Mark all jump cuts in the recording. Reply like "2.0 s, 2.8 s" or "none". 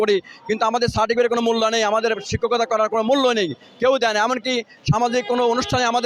none